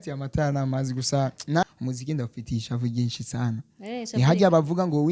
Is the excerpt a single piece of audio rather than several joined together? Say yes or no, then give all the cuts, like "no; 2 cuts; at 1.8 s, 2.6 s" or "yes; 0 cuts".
no; 1 cut; at 1.6 s